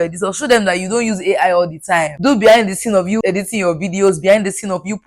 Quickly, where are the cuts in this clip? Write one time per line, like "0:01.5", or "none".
0:02.1
0:03.2